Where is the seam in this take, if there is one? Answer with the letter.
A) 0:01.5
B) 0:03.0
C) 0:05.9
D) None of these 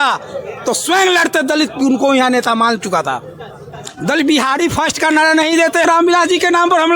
C